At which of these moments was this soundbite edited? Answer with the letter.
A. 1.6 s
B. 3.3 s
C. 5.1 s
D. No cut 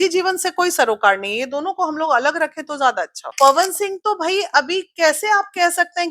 B